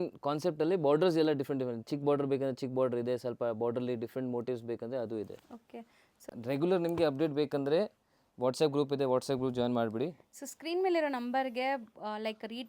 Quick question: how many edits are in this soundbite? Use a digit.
1